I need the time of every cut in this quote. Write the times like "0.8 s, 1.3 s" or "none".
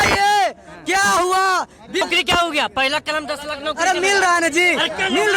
2.0 s